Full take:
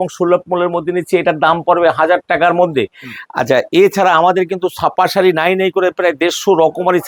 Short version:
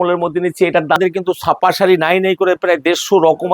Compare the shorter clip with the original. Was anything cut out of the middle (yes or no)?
yes